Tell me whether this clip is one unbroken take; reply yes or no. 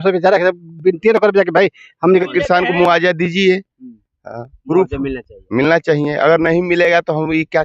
no